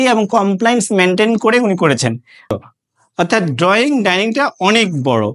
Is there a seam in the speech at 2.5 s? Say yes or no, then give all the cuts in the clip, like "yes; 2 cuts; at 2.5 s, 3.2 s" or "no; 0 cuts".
yes; 1 cut; at 2.5 s